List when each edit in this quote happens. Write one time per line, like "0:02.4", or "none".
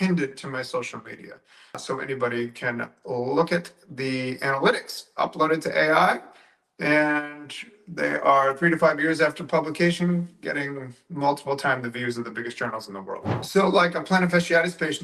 0:13.3